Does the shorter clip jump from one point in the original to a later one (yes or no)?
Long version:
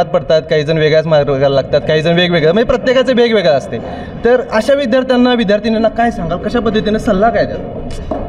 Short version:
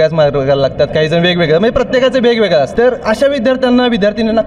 yes